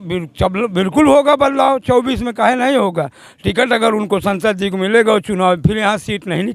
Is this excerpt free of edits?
yes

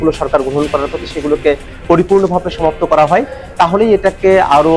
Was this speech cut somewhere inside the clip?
no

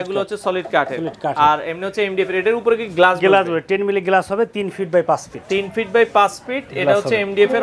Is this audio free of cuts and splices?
yes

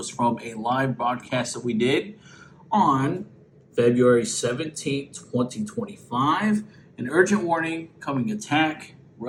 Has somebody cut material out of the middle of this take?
no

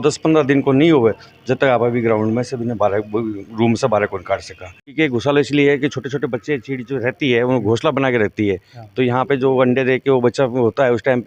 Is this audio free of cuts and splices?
no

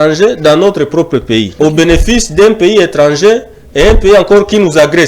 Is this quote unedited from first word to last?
no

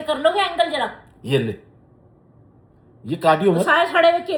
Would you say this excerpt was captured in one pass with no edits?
yes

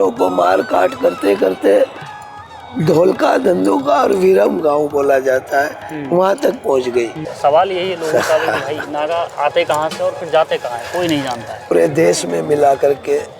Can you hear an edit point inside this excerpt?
yes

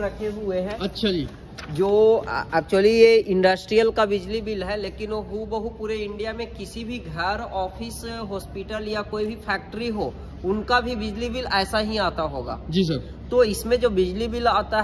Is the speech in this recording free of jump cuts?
yes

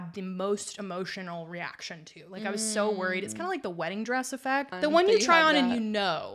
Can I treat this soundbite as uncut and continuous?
no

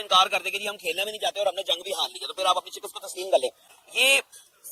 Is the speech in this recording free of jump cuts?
yes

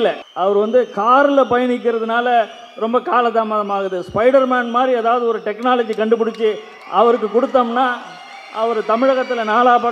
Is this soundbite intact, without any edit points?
yes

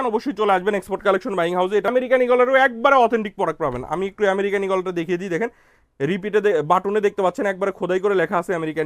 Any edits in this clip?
yes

